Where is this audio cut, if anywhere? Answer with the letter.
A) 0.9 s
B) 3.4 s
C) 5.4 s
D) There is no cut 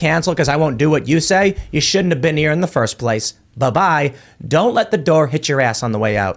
B